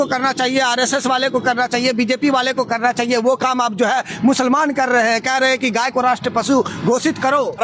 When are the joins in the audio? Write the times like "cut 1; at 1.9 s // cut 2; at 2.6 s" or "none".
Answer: none